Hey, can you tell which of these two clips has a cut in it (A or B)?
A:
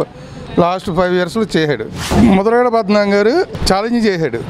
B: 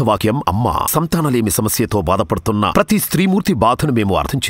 A